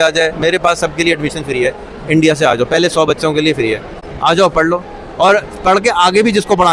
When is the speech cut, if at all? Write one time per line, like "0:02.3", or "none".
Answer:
none